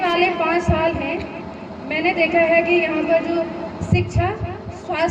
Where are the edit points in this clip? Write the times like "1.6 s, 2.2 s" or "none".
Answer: none